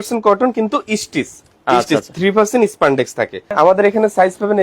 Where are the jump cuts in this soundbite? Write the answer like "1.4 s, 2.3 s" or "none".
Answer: 3.5 s